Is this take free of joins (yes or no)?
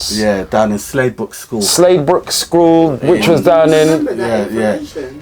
yes